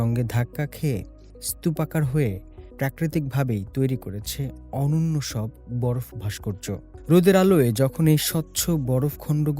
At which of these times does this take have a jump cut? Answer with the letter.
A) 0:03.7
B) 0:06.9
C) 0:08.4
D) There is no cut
D